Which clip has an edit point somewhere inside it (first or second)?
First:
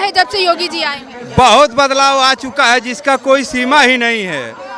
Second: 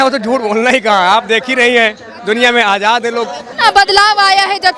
second